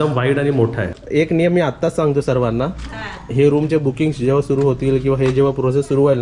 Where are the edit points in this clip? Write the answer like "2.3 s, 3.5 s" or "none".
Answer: 1.0 s